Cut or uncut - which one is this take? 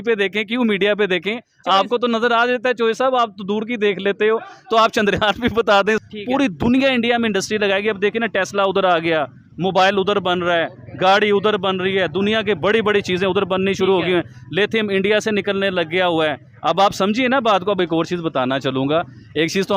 cut